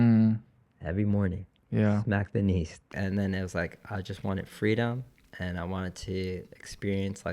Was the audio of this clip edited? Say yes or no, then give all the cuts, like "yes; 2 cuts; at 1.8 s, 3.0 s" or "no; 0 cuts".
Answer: yes; 1 cut; at 2.9 s